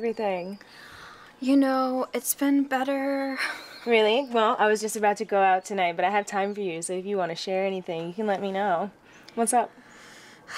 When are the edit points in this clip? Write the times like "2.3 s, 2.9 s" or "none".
none